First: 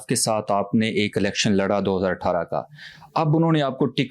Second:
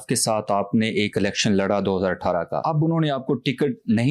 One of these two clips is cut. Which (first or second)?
second